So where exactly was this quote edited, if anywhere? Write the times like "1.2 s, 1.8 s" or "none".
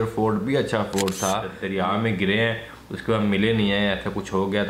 1.6 s